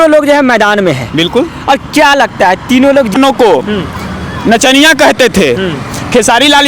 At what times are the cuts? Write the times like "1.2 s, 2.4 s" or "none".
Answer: 3.1 s

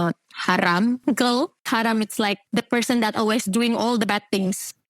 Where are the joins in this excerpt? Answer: 1.6 s, 2.4 s

